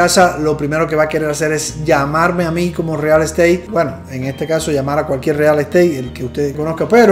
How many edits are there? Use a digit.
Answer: 0